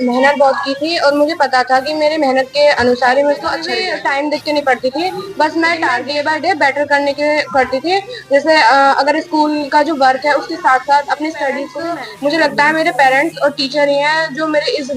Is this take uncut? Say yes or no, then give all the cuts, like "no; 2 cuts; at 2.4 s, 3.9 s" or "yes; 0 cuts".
no; 3 cuts; at 3.8 s, 6.0 s, 11.7 s